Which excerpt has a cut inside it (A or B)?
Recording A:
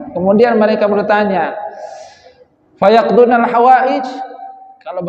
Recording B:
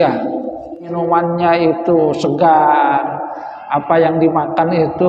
B